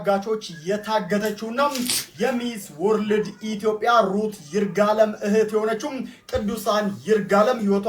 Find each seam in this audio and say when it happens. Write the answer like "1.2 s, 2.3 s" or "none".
none